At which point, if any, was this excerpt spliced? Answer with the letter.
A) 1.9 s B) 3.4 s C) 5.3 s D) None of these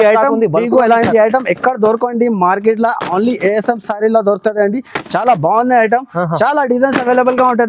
D